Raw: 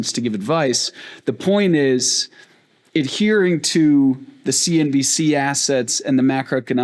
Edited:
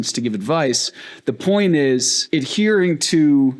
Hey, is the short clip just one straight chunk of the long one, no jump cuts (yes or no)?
no